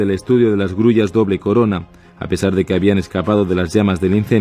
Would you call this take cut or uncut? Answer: uncut